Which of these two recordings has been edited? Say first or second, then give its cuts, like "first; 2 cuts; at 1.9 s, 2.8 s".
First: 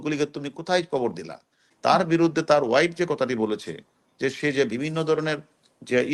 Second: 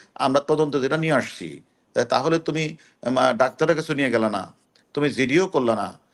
first; 1 cut; at 1.7 s